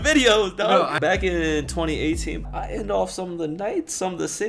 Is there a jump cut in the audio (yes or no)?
yes